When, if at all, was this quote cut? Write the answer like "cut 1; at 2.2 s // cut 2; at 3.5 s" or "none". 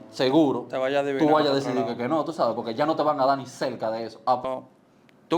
cut 1; at 4.4 s